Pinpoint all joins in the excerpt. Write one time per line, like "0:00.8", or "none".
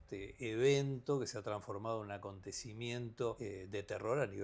0:03.4